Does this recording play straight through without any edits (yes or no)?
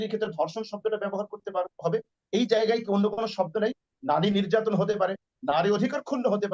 yes